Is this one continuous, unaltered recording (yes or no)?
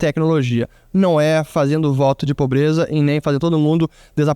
yes